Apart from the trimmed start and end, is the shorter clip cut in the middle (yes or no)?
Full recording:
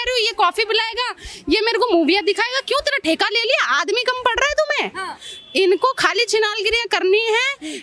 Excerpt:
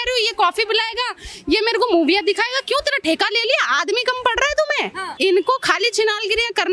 yes